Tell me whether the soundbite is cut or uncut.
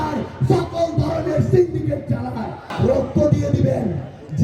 cut